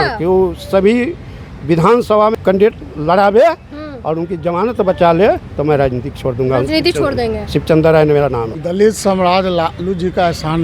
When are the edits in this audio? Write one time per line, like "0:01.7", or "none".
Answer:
0:02.3
0:08.5